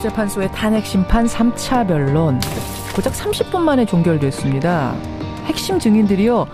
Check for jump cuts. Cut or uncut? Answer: uncut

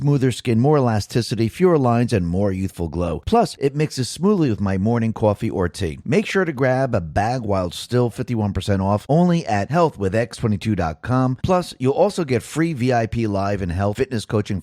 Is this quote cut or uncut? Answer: cut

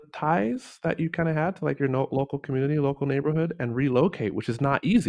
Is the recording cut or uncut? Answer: uncut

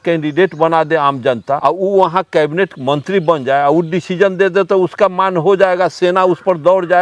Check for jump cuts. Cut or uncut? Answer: cut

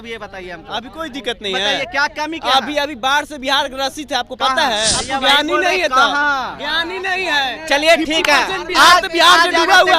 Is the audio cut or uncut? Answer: cut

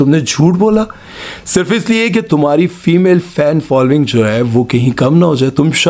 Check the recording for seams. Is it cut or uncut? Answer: uncut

